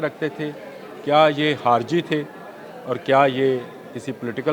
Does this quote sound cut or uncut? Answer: uncut